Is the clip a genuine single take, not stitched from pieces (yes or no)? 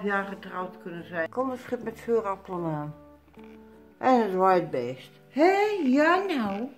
no